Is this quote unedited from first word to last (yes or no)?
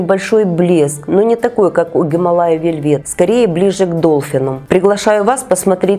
yes